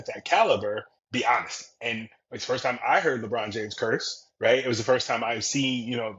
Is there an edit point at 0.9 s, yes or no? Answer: yes